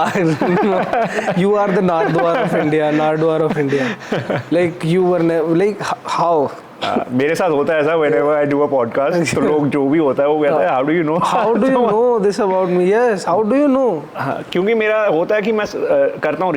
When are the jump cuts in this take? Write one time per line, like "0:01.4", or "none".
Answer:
none